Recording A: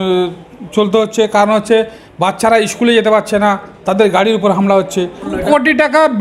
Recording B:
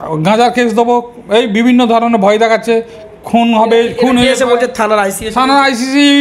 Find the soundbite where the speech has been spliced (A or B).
A